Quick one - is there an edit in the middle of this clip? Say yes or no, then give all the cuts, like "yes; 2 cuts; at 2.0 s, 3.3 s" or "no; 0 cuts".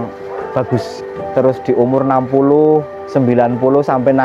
yes; 1 cut; at 1.2 s